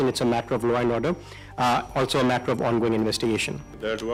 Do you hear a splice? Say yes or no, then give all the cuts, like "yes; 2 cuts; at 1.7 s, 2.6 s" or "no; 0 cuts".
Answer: no; 0 cuts